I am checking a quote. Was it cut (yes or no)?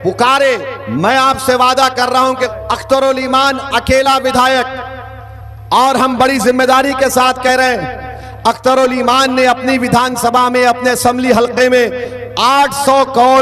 yes